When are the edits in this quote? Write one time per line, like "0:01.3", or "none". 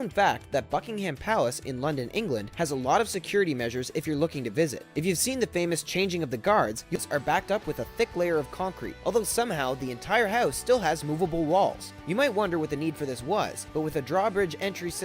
0:06.9